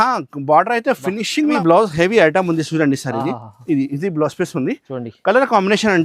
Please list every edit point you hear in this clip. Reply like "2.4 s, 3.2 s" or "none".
1.5 s